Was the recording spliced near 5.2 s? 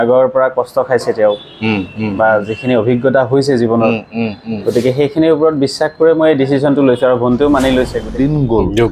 no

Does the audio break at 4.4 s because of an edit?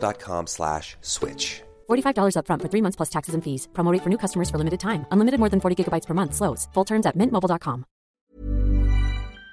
no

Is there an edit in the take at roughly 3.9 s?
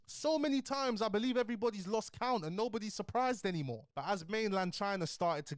yes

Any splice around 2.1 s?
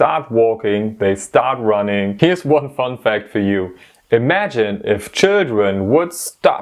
yes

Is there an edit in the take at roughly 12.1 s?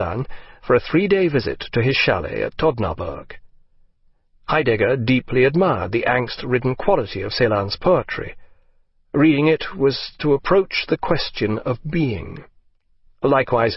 no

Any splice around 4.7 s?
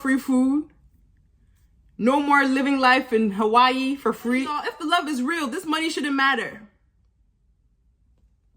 yes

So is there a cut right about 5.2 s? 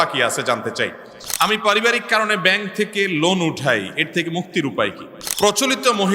yes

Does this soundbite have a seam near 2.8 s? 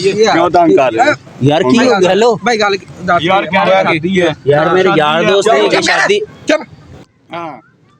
no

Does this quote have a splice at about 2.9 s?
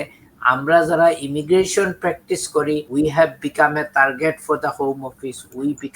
yes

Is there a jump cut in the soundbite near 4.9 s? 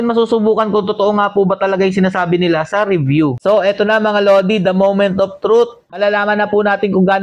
no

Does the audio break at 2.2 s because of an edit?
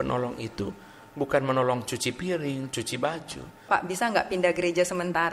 no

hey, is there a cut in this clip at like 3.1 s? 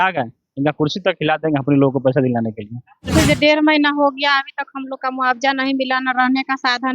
yes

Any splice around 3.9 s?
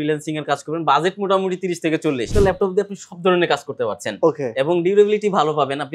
no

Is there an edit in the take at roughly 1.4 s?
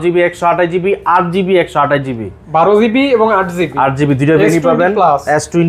no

